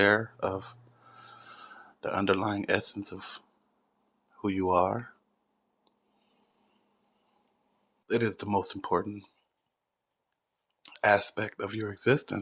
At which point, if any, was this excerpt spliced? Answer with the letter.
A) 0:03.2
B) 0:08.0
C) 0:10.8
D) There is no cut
B